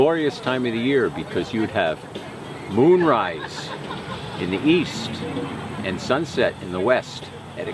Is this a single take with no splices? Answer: yes; 0 cuts

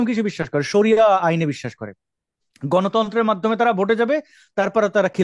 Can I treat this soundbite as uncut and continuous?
yes; 0 cuts

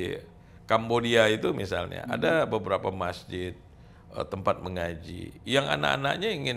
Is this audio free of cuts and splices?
yes; 0 cuts

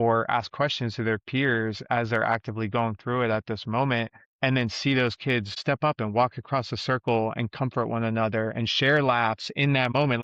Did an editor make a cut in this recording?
no; 0 cuts

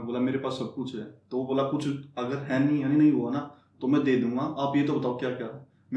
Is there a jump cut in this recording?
no; 0 cuts

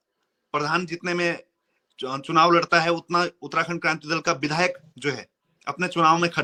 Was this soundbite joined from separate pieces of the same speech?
no; 0 cuts

